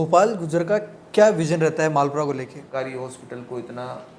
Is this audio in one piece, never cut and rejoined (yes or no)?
no